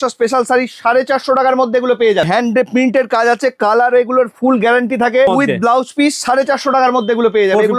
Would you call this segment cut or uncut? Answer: cut